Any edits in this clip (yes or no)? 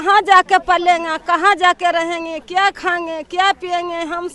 no